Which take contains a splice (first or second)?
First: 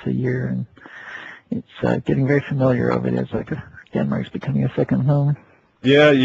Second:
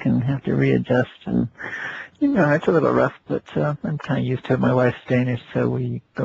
second